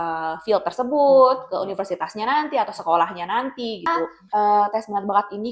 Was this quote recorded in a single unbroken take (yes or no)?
no